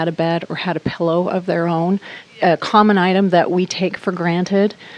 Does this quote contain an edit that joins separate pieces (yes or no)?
yes